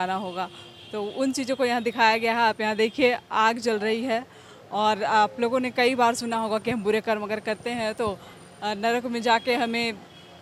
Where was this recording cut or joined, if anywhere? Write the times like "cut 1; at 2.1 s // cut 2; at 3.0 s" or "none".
none